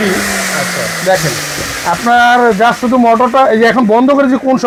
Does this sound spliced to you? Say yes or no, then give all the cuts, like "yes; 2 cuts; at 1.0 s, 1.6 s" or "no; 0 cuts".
no; 0 cuts